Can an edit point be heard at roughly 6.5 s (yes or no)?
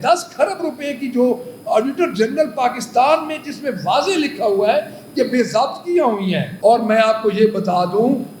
yes